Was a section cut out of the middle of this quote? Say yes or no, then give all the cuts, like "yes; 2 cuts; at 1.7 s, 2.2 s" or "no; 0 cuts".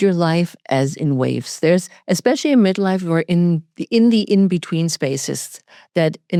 no; 0 cuts